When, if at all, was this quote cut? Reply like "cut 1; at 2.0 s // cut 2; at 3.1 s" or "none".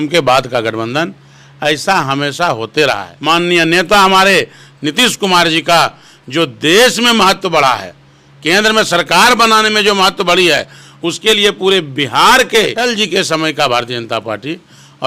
cut 1; at 3.1 s // cut 2; at 12.8 s